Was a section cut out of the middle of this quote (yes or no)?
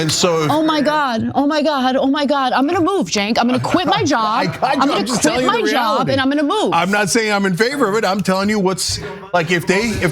yes